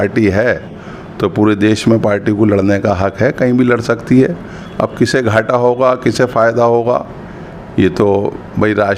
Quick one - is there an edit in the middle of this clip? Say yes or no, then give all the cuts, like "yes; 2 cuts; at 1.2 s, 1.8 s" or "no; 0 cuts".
no; 0 cuts